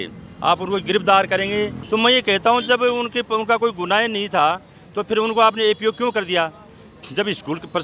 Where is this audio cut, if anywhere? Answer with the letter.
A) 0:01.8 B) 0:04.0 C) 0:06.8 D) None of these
A